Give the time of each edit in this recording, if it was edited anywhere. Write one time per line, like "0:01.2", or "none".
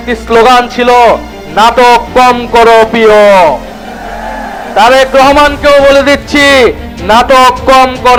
none